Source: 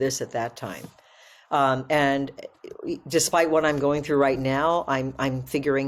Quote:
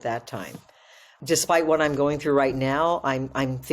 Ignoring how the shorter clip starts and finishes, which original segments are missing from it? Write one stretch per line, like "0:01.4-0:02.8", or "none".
0:01.4-0:02.9